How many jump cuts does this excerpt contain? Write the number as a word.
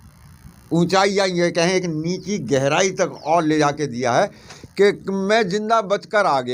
zero